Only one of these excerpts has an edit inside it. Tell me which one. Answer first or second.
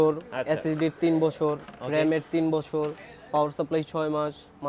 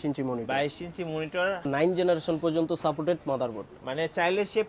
second